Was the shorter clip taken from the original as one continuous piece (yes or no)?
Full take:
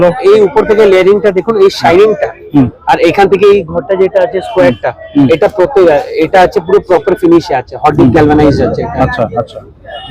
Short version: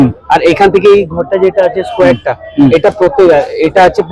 yes